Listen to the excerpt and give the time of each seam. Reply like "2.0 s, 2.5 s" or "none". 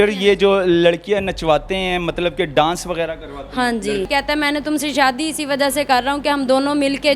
4.1 s